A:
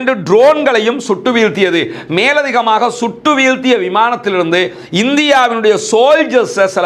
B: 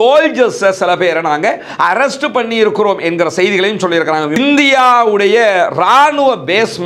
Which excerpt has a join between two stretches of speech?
B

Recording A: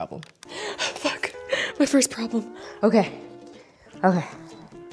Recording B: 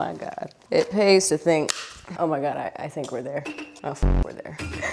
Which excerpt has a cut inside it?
B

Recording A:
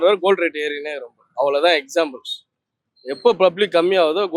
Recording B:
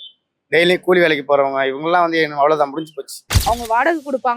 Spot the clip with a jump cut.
B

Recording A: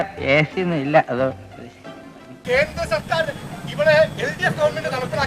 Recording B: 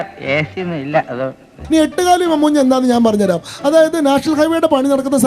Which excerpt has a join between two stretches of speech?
B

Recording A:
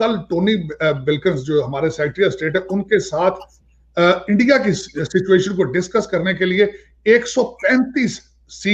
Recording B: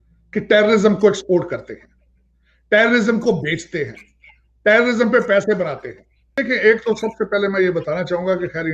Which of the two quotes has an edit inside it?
B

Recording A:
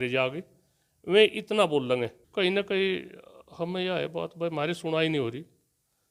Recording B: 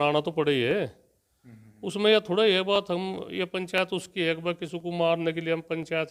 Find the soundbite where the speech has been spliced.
A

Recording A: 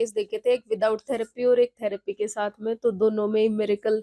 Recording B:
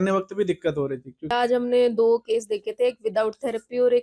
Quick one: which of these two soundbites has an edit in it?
B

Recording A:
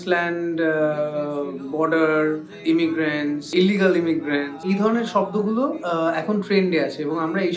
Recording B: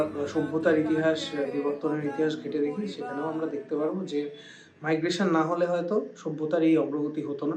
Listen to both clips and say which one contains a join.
A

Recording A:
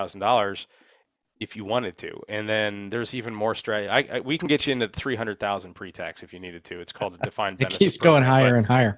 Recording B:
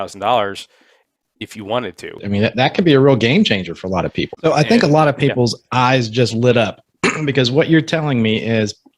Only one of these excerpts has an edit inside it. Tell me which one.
B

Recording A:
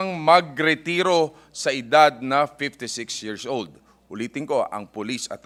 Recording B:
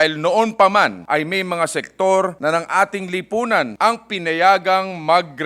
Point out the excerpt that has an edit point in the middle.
B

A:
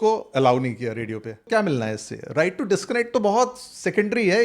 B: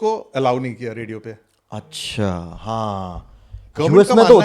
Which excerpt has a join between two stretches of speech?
A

